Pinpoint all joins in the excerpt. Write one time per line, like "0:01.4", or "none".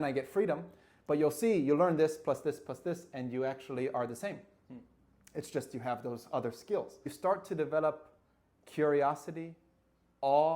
0:07.1